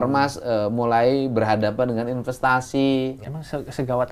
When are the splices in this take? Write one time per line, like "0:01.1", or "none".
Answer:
0:03.2